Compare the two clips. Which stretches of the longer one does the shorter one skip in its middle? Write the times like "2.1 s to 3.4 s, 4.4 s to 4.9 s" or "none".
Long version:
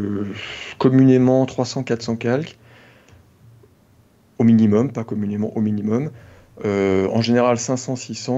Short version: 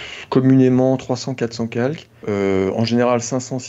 2.6 s to 6.5 s